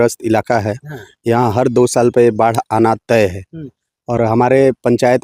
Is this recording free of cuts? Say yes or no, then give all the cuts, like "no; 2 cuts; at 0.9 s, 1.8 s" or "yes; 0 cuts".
yes; 0 cuts